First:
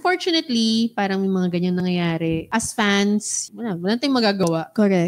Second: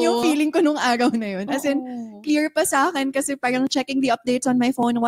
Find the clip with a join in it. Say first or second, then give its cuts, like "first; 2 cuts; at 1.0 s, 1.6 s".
first; 2 cuts; at 2.4 s, 3.4 s